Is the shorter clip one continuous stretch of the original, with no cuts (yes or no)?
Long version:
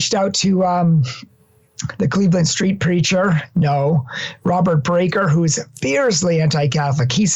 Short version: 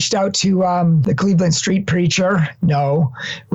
no